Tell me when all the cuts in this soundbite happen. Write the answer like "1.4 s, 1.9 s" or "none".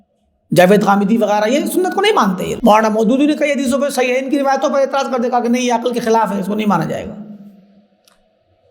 2.5 s